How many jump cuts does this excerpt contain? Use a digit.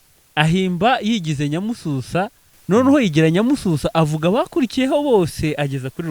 1